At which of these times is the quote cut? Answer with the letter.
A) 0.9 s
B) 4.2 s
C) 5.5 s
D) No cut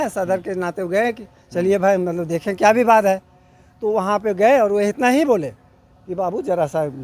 D